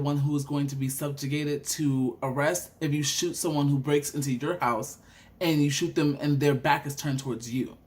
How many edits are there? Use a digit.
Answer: 0